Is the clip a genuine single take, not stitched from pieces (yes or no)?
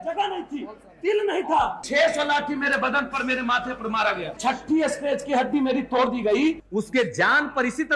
no